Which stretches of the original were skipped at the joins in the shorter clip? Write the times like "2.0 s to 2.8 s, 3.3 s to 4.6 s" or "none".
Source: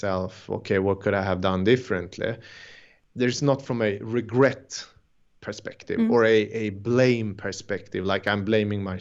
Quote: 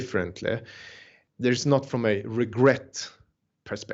none